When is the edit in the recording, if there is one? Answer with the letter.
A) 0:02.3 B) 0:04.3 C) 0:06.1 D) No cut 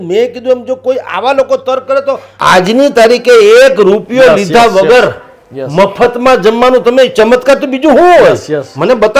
A